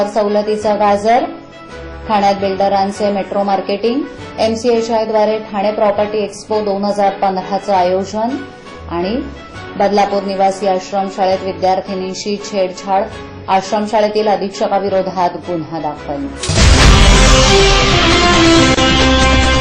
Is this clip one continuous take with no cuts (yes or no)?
no